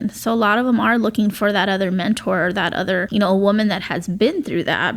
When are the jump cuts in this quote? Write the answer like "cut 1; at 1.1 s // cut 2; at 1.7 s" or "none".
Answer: cut 1; at 3.1 s